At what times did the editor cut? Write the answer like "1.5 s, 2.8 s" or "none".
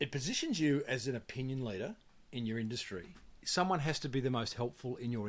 3.4 s